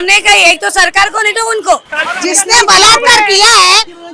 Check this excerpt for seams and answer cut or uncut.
cut